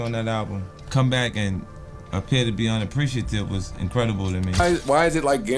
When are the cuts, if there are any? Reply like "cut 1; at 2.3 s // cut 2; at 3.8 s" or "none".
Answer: cut 1; at 4.5 s